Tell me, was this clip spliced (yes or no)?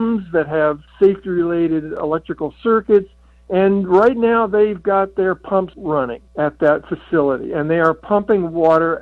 yes